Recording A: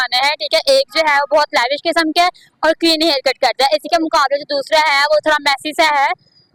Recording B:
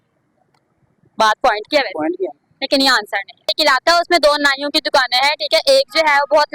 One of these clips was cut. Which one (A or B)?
B